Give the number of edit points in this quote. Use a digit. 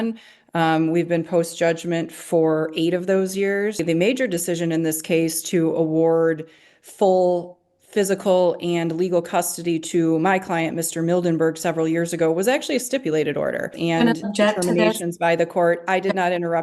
2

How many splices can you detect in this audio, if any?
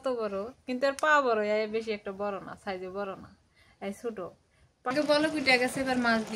1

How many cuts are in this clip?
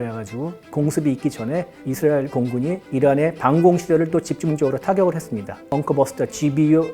1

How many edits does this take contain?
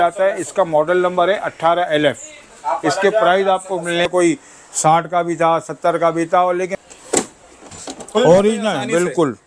2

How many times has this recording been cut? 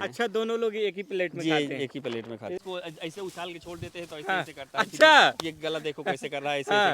1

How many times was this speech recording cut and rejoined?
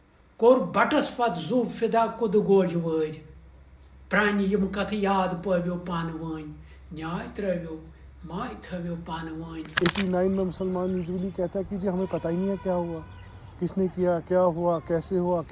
1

